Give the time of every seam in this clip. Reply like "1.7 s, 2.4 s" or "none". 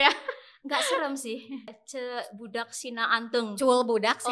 1.8 s